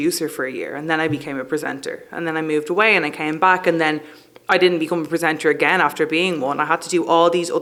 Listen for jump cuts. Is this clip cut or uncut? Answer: uncut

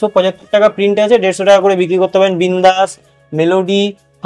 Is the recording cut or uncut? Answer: uncut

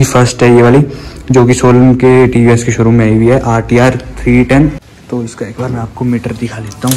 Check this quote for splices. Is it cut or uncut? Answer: cut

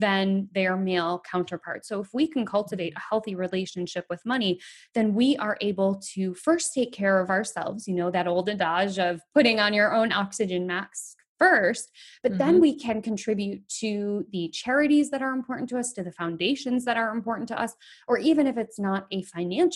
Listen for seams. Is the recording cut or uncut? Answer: uncut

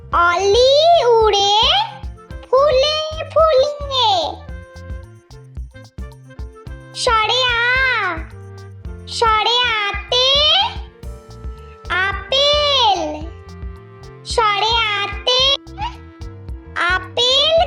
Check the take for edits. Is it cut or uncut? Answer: cut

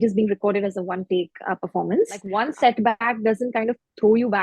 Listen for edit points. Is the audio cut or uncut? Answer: cut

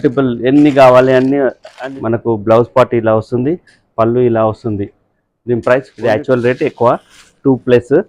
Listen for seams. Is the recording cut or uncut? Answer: cut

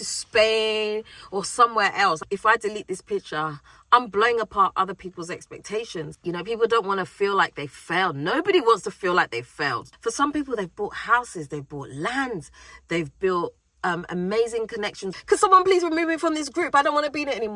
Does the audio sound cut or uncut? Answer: cut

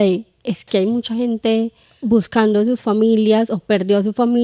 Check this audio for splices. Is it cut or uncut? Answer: uncut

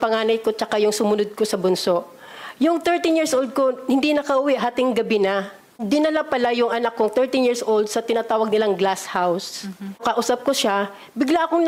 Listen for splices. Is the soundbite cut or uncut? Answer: cut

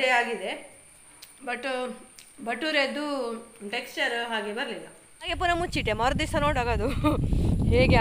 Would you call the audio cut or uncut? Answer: cut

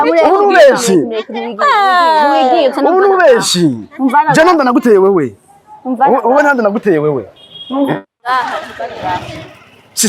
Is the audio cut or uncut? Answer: uncut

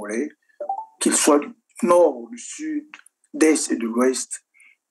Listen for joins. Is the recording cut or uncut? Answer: uncut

